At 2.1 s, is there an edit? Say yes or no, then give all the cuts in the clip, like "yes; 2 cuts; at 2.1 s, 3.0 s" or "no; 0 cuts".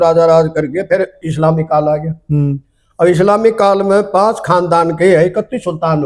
no; 0 cuts